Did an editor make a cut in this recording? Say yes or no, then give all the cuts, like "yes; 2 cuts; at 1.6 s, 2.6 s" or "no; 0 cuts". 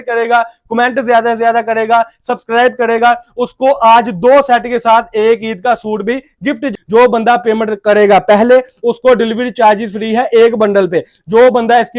yes; 1 cut; at 6.7 s